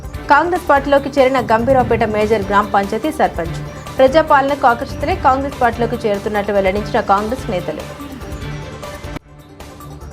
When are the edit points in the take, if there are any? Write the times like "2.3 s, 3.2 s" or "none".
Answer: 7.8 s